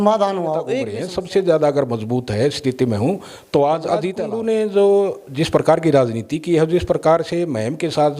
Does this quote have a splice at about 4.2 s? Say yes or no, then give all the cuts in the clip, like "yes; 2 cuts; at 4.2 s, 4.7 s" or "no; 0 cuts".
yes; 2 cuts; at 1.0 s, 4.2 s